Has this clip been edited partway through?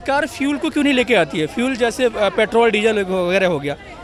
no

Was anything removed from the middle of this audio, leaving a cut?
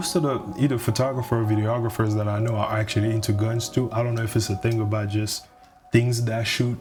no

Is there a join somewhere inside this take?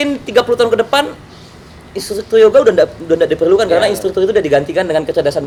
no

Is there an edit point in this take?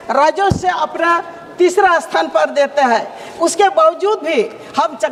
no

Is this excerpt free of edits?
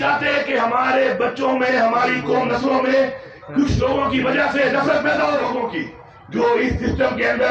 no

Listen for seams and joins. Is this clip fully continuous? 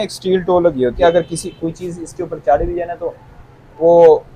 no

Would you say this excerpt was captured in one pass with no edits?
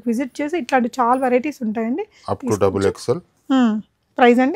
yes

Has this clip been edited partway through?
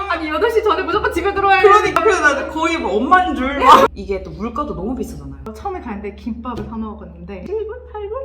yes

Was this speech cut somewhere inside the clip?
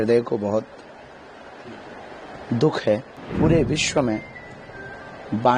yes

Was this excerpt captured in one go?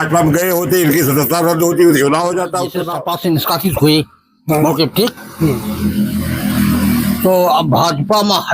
no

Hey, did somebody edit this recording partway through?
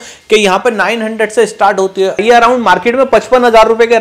yes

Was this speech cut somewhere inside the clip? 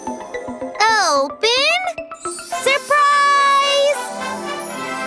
yes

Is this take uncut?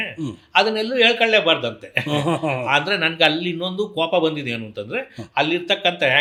yes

